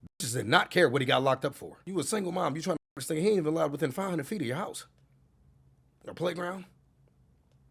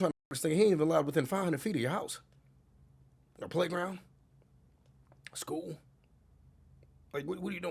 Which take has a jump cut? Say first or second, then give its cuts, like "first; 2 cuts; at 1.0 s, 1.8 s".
first; 1 cut; at 1.7 s